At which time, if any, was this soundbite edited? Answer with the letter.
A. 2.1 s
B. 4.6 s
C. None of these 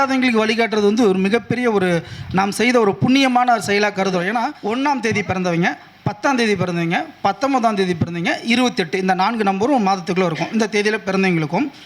B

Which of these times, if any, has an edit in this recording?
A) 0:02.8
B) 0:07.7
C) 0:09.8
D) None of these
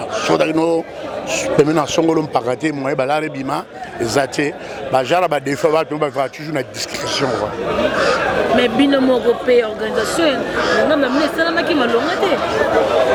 D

